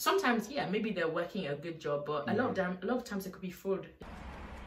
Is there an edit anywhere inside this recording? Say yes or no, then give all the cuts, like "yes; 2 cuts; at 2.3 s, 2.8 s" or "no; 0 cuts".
no; 0 cuts